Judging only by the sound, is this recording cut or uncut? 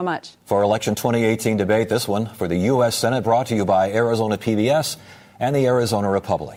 uncut